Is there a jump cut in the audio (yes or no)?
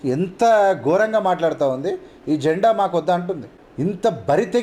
yes